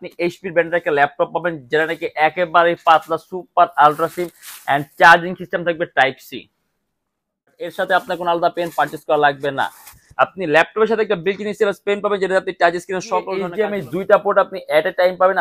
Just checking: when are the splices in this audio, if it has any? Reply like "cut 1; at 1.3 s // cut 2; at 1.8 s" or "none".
cut 1; at 7.7 s // cut 2; at 13.4 s

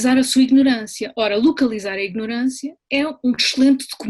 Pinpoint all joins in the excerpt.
none

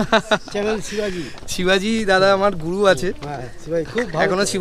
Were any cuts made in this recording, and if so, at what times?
none

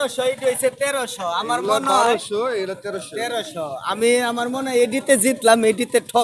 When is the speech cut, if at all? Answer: none

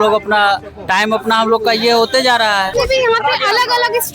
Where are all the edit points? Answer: cut 1; at 2.7 s

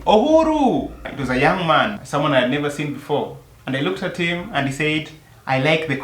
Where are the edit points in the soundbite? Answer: none

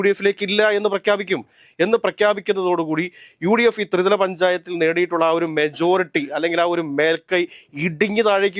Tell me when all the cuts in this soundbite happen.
none

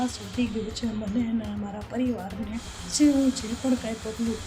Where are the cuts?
cut 1; at 2.8 s

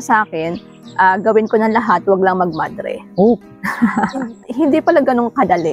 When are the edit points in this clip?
cut 1; at 4.4 s

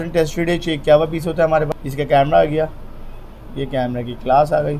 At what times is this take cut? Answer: cut 1; at 1.7 s

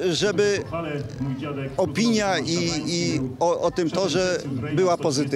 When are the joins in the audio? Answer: none

